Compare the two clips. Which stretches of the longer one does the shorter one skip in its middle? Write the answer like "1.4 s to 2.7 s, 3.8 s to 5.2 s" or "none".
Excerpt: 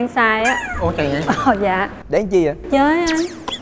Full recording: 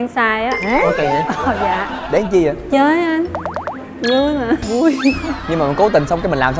none